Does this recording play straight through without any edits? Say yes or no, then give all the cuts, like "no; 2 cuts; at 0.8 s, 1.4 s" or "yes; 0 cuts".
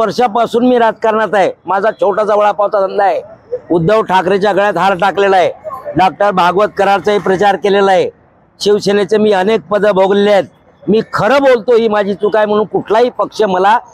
yes; 0 cuts